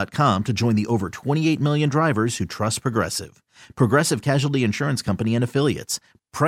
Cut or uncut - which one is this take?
uncut